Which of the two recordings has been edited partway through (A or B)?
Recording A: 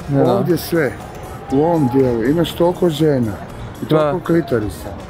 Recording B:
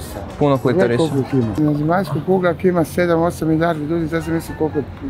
B